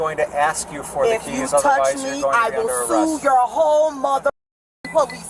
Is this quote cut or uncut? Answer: uncut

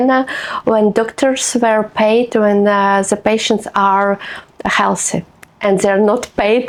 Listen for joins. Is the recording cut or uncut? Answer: uncut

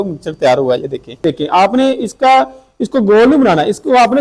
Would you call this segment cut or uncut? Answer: cut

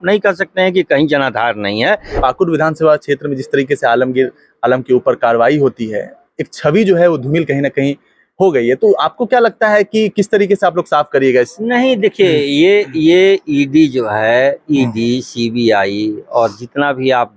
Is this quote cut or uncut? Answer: cut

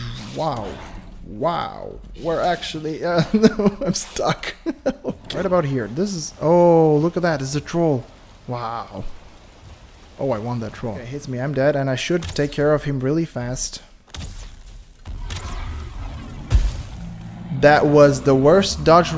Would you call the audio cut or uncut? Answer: cut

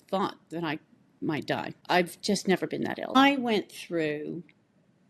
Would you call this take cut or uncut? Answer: cut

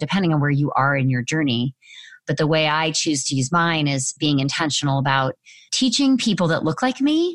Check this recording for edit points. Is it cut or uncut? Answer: cut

